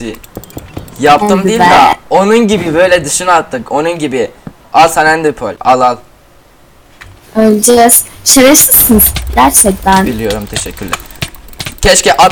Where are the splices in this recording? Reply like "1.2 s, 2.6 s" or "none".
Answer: 5.6 s